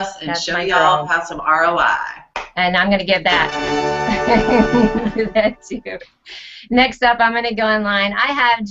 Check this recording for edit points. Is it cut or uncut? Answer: cut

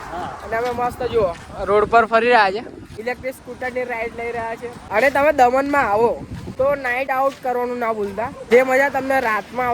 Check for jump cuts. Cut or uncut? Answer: cut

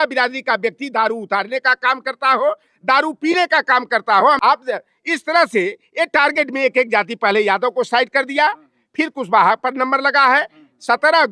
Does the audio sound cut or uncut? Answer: cut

